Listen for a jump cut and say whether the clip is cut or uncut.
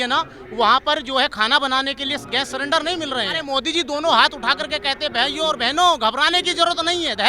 cut